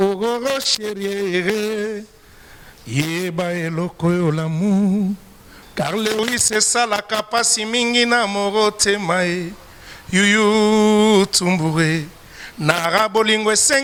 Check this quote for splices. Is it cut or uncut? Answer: uncut